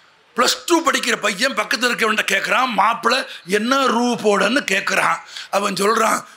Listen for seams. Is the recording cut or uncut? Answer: uncut